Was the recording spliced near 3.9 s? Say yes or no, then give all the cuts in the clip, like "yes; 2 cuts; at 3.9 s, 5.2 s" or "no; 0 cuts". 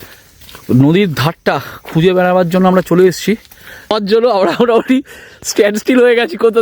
yes; 1 cut; at 3.9 s